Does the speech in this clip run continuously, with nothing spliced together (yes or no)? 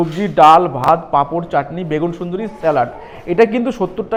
yes